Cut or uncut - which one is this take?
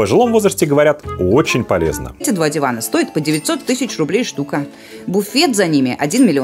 cut